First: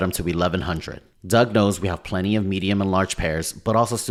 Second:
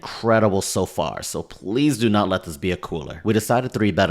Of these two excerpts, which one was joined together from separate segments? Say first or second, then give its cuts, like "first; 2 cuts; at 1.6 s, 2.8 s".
second; 1 cut; at 3.1 s